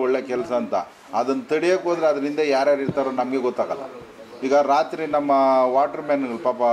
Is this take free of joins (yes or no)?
yes